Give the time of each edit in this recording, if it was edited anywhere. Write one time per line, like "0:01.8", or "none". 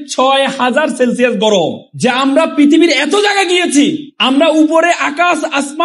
0:01.9
0:04.1